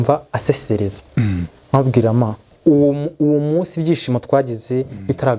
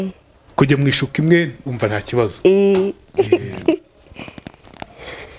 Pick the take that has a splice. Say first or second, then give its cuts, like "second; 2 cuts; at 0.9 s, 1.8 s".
first; 1 cut; at 2.5 s